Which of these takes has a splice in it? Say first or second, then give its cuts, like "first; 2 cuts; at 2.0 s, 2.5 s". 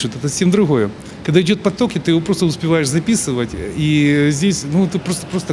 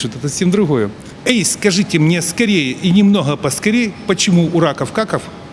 second; 1 cut; at 1.1 s